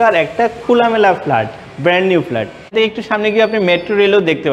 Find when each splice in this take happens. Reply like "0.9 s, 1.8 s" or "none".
2.7 s